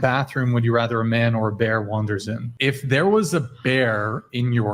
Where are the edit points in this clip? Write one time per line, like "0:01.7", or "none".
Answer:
0:02.5